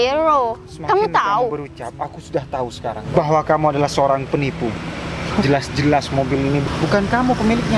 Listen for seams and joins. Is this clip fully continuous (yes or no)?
no